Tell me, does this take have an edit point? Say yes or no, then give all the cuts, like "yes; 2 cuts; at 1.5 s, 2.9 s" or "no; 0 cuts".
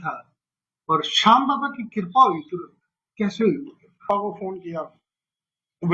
yes; 1 cut; at 4.1 s